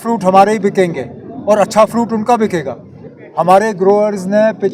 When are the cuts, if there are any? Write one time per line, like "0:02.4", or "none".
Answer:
none